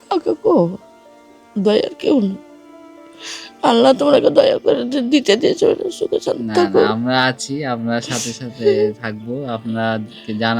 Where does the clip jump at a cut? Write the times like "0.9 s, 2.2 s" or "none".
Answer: none